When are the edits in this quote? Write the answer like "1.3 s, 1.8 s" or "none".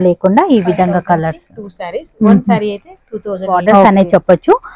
3.8 s